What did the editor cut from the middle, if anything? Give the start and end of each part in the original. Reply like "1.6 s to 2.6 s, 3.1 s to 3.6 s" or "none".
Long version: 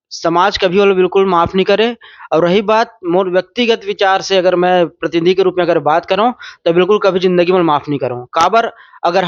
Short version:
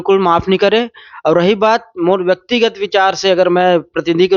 none